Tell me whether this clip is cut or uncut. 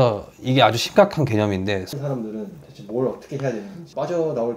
cut